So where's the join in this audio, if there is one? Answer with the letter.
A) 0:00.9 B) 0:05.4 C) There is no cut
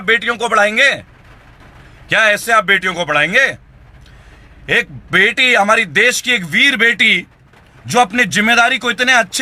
C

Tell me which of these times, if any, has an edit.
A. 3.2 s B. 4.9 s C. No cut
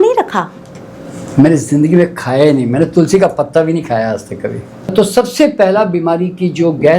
B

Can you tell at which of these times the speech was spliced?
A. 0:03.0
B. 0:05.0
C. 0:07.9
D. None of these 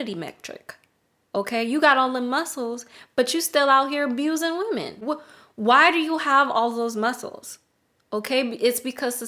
B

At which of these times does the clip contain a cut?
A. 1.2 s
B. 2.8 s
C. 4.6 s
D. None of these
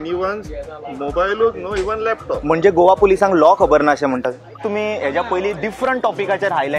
C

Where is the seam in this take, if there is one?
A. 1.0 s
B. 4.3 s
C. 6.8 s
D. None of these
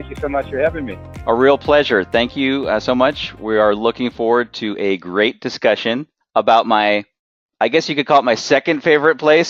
D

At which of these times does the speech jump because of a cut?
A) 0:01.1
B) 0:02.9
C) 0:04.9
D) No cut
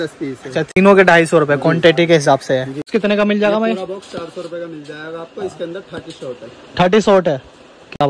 B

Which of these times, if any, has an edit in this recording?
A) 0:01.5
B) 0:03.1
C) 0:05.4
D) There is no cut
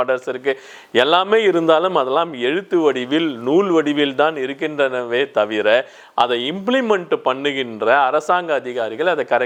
D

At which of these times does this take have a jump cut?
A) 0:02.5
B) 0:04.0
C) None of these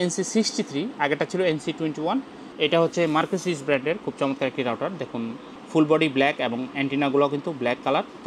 A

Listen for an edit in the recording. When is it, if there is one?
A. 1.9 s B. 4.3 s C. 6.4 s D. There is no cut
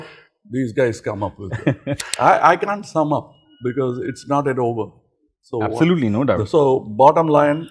A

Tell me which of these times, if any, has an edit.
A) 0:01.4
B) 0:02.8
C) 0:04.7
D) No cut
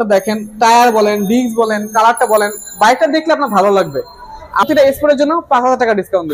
C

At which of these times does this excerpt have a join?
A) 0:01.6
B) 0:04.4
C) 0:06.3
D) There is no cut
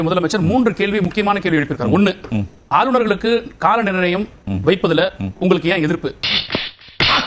C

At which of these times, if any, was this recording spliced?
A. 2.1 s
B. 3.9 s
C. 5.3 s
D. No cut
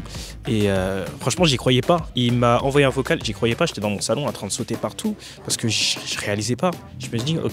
A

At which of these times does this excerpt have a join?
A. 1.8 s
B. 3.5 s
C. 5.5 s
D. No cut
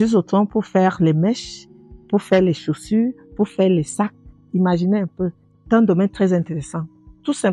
C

